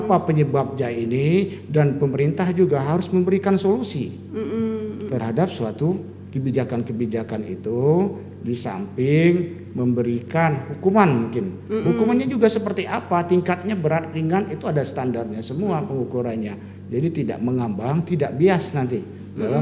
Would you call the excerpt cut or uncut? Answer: uncut